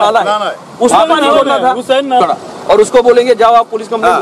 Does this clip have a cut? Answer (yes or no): yes